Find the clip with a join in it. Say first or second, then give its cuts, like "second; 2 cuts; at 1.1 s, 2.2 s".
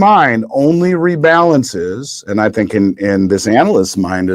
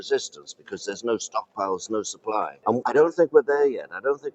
second; 1 cut; at 2.7 s